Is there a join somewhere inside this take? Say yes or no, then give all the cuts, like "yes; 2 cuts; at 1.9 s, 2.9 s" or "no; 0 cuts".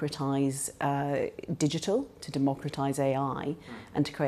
no; 0 cuts